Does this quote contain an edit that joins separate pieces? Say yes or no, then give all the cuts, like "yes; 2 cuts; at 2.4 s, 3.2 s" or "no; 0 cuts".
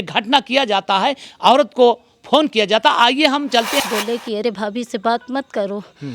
yes; 1 cut; at 3.8 s